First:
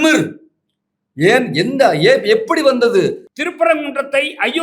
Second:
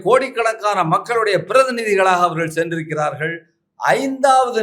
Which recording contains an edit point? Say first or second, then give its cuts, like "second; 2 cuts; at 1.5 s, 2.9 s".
first; 1 cut; at 3.3 s